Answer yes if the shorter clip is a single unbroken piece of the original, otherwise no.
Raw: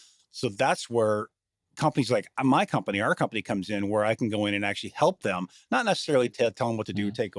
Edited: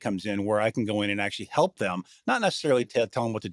yes